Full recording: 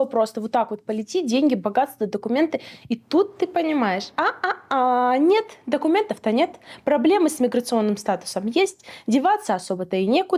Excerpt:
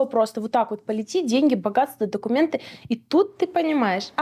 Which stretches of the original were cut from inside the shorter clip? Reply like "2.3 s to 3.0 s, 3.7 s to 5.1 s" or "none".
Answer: none